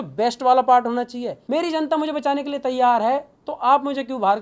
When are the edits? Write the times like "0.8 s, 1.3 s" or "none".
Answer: 1.3 s